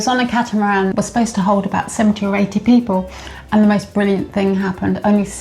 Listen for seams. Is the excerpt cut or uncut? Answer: cut